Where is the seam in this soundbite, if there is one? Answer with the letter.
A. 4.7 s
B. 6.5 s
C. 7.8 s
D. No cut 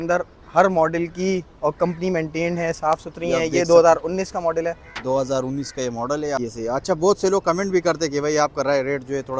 B